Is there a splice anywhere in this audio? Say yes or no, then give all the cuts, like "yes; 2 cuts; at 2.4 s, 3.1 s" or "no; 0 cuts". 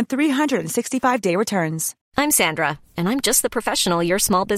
yes; 1 cut; at 1.9 s